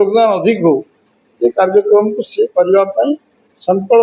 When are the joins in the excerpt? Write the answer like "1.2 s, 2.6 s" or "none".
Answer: none